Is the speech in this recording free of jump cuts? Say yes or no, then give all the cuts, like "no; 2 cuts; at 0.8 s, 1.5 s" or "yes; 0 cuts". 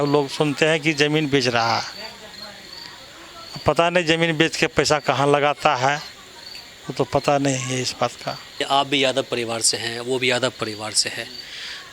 no; 1 cut; at 8.6 s